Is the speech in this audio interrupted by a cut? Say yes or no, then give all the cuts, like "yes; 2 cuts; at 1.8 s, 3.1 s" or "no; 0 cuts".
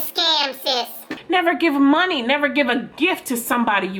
yes; 1 cut; at 1.2 s